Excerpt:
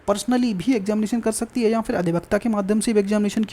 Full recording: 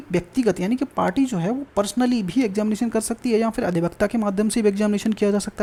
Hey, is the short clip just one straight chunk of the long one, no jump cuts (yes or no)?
yes